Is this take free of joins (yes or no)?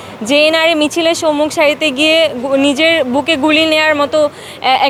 yes